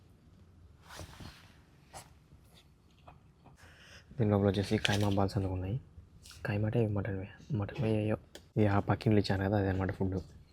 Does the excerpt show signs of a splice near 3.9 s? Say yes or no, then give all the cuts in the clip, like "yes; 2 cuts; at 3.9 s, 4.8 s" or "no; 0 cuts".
yes; 2 cuts; at 3.9 s, 8.4 s